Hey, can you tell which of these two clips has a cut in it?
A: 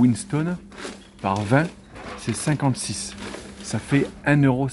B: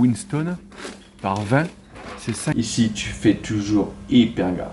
B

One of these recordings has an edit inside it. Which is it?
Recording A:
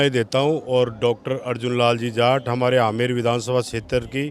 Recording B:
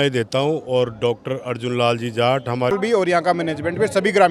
B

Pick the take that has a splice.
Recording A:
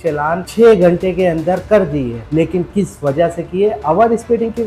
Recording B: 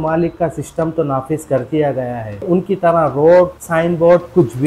A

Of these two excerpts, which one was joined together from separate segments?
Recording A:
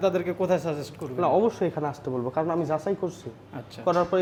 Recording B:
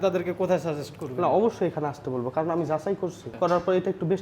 B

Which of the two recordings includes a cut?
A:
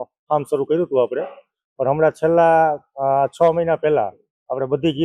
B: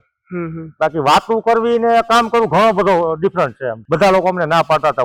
B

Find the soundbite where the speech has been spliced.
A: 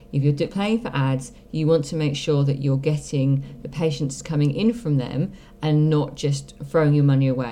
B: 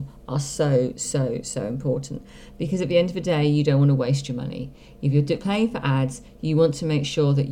A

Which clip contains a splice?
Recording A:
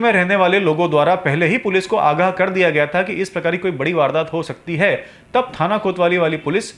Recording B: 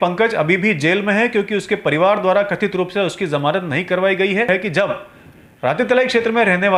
B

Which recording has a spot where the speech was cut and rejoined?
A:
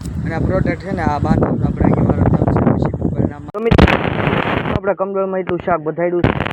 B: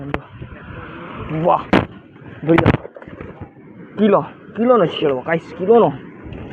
A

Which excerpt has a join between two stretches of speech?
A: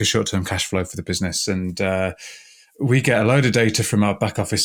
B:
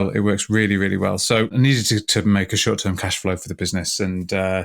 B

